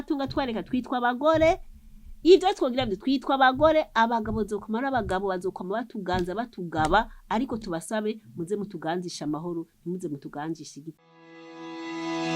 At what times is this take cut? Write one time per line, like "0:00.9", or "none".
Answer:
0:10.9